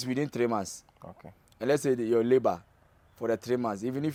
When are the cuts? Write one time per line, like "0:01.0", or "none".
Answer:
none